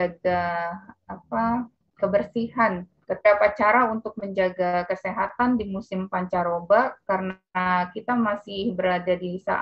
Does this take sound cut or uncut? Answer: cut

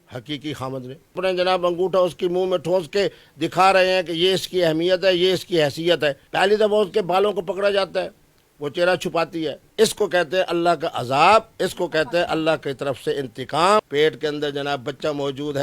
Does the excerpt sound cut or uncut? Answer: cut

